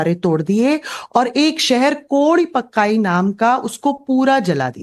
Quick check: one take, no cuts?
yes; 0 cuts

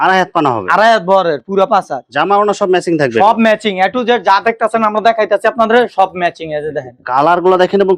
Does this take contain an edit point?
no; 0 cuts

